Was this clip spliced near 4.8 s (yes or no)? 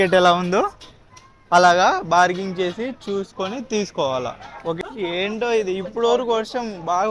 yes